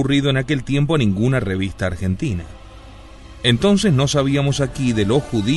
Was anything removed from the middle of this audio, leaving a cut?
yes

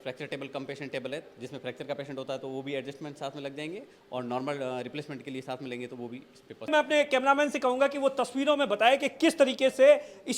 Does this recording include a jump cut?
yes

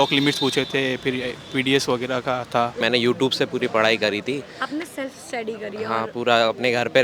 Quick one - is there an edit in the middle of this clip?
yes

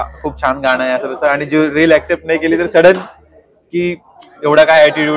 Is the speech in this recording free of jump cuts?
yes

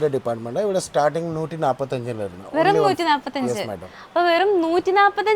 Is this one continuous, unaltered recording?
yes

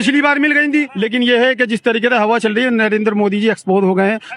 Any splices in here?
yes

